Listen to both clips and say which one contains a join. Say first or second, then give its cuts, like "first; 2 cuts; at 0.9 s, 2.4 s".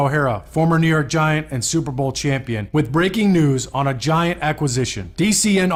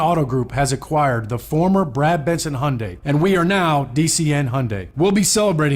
second; 2 cuts; at 2.9 s, 4.8 s